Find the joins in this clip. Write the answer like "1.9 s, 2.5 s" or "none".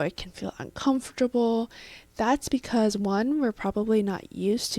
none